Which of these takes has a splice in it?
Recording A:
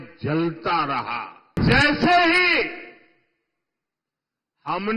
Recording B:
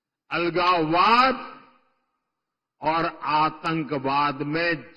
A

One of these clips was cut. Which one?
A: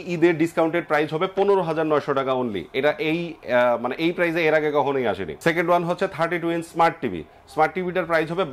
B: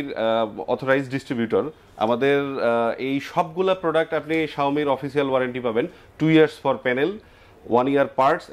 A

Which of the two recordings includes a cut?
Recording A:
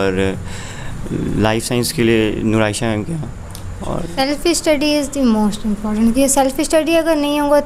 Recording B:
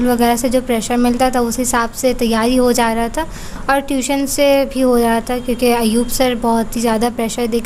A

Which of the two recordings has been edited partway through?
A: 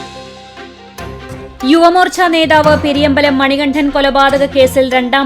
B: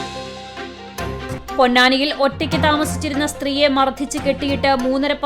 A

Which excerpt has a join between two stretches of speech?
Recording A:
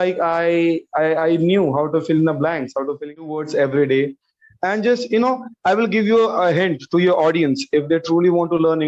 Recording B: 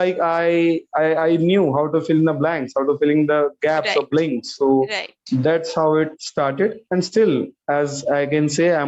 A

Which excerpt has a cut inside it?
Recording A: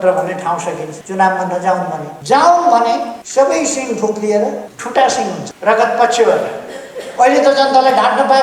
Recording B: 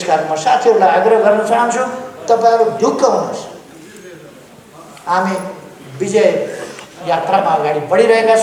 A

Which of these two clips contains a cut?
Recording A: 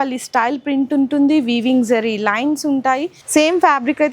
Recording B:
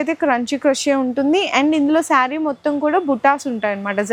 A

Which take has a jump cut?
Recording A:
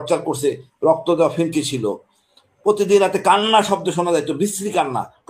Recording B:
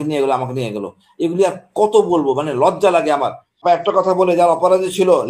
B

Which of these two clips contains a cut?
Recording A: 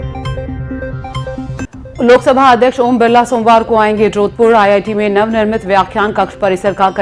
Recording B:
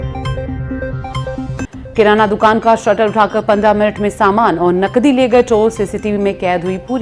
A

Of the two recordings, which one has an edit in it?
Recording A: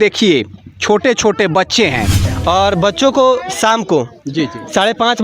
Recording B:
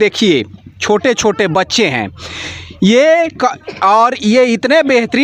A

